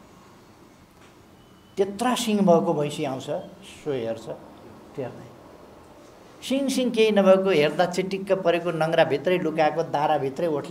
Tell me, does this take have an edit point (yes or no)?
no